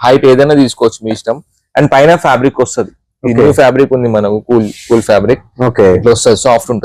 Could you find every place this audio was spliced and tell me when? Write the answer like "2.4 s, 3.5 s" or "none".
none